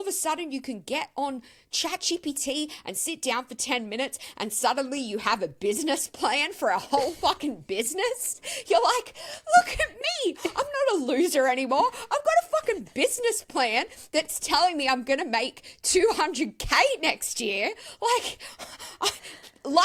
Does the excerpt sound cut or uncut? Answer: uncut